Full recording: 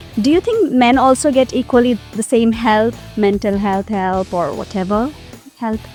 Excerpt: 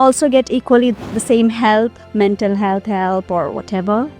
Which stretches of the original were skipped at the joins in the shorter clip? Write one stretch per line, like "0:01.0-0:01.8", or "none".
none